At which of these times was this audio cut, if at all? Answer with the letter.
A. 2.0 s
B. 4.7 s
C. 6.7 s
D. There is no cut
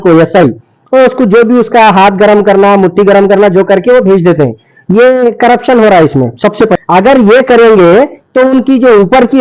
C